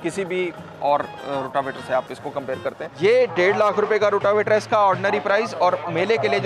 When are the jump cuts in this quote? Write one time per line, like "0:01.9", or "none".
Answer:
0:02.9